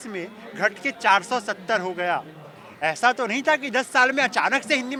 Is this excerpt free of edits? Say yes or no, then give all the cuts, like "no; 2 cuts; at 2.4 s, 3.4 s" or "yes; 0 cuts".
yes; 0 cuts